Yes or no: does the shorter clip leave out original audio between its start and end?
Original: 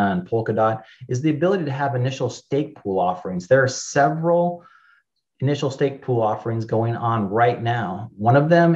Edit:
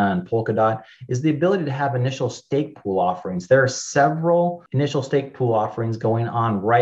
yes